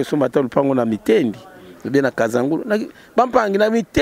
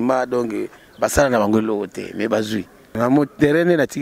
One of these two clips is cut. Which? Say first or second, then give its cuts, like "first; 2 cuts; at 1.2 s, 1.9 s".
second; 1 cut; at 2.9 s